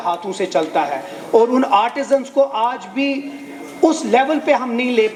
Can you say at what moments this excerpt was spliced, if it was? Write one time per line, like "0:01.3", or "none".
none